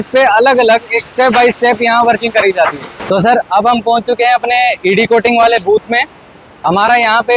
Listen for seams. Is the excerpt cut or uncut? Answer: cut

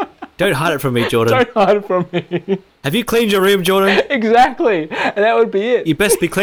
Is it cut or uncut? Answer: uncut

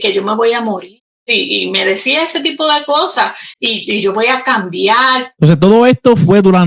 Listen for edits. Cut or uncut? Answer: cut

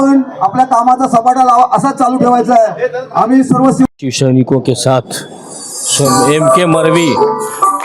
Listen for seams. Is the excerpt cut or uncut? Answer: cut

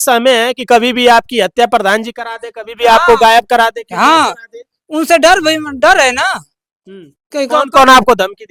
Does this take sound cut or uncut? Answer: uncut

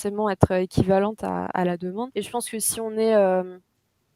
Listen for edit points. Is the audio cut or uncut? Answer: cut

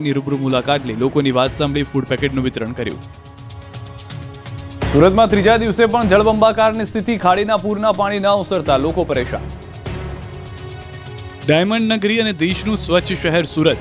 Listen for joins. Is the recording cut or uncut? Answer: uncut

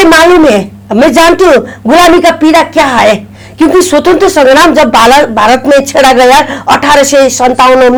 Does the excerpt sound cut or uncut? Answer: uncut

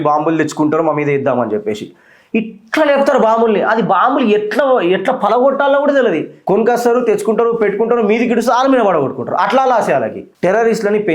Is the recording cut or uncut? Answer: cut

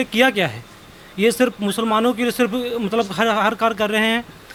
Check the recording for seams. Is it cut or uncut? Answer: uncut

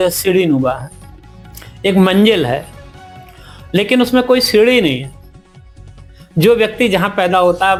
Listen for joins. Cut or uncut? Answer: uncut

